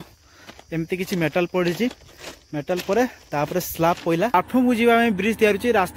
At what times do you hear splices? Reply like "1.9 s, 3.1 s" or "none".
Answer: 4.3 s